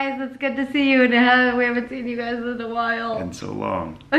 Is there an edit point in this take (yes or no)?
no